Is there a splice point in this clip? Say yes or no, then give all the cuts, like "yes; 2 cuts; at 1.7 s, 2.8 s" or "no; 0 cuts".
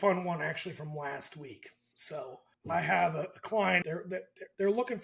yes; 2 cuts; at 2.5 s, 3.8 s